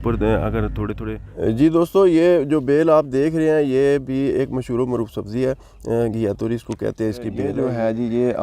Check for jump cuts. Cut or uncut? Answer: cut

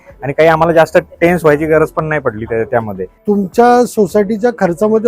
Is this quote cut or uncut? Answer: cut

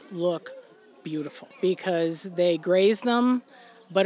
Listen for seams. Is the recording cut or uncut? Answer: cut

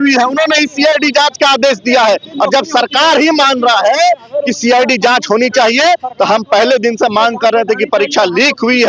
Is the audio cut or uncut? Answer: uncut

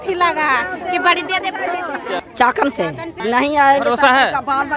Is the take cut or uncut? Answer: cut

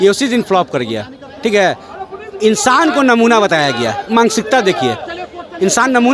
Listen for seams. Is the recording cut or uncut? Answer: uncut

